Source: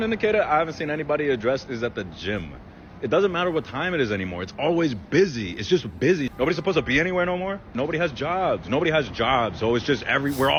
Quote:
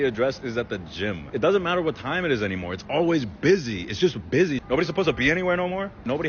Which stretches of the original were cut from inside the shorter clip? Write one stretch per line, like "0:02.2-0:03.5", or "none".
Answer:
0:02.5-0:02.9